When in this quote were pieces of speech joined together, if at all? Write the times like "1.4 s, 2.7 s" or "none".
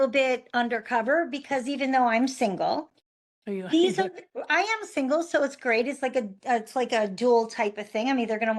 none